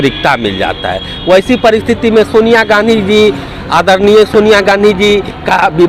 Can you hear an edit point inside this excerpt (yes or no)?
no